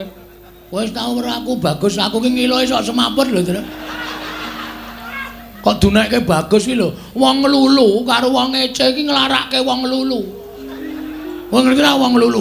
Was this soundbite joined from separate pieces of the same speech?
no; 0 cuts

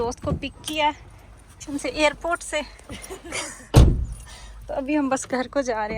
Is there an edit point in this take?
yes; 1 cut; at 1.6 s

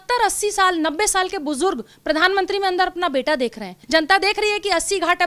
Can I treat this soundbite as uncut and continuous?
no; 1 cut; at 3.7 s

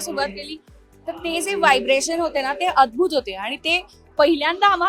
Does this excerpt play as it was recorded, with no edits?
yes; 0 cuts

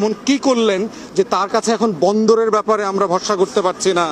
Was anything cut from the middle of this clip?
no; 0 cuts

